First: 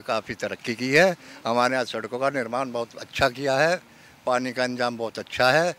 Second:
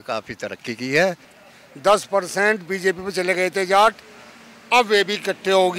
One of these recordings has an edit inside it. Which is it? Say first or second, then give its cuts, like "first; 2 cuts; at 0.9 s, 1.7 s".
second; 1 cut; at 1.3 s